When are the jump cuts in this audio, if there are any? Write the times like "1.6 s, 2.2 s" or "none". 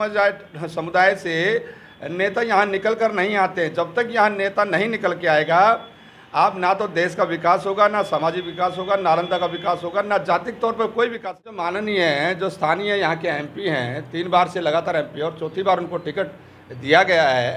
11.7 s